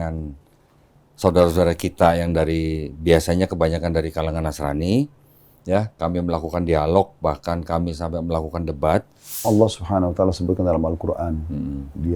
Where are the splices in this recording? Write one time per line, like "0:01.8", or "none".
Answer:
0:09.4